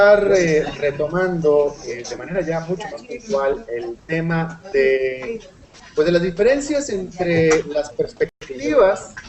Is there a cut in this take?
no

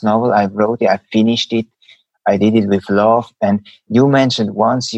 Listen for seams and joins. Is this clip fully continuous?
yes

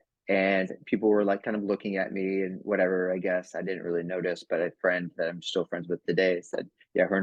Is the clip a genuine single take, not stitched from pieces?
yes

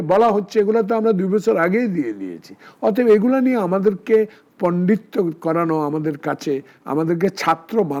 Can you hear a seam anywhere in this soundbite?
no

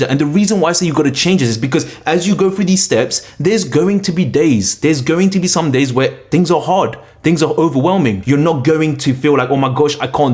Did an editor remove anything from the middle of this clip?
yes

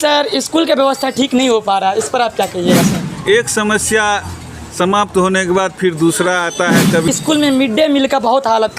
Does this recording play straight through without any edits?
no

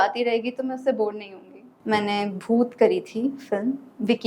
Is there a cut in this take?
yes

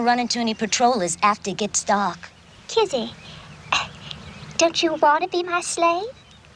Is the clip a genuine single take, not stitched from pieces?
yes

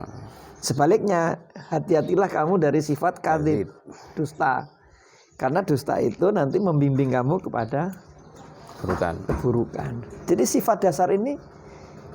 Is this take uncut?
yes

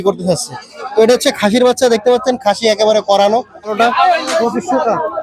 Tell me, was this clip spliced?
yes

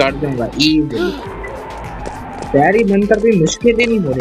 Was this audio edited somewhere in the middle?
no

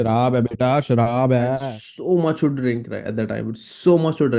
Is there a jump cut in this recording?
yes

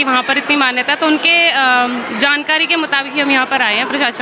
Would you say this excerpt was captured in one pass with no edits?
yes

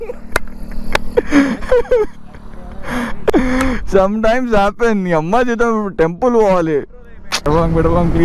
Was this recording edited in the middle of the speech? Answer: yes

